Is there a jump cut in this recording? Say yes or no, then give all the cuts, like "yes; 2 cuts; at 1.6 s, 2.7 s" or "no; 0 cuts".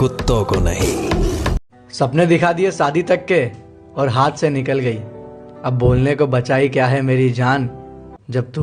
yes; 1 cut; at 1.6 s